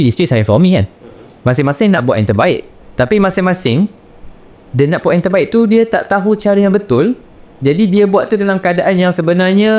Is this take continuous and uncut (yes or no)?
yes